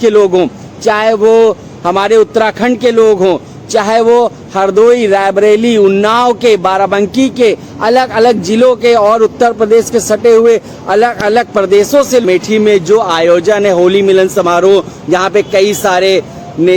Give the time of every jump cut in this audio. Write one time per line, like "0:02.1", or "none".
0:12.2

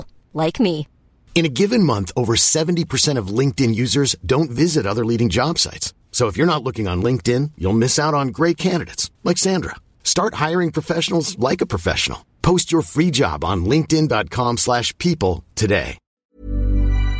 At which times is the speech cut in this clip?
0:16.1

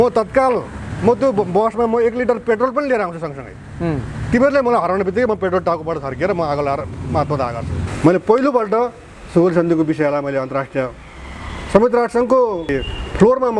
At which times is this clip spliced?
0:07.8
0:12.7

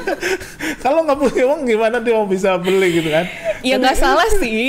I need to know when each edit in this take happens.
none

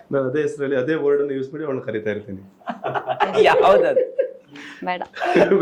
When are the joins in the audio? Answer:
none

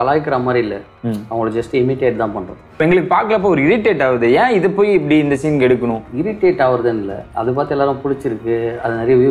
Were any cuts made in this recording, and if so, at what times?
0:02.8
0:06.0

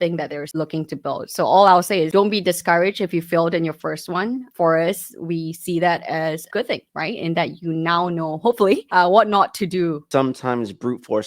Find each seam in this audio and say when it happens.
0:10.0

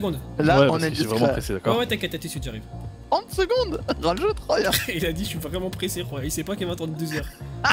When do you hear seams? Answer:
none

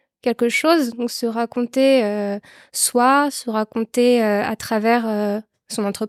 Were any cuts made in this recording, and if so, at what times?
none

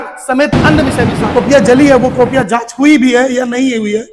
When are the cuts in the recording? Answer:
0:01.0

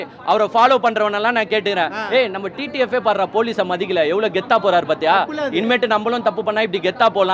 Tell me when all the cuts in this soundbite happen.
none

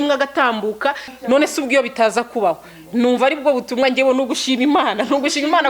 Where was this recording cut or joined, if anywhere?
0:01.1

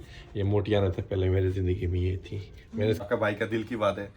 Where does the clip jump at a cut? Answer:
0:03.0

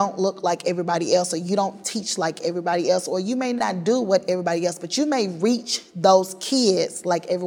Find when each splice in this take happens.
0:03.3

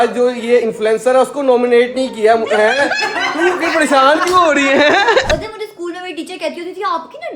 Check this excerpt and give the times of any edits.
0:05.3

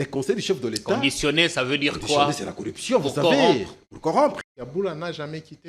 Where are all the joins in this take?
0:04.5

